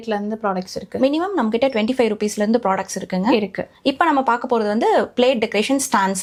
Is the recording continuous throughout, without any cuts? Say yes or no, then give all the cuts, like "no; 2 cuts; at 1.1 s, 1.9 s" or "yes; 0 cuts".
yes; 0 cuts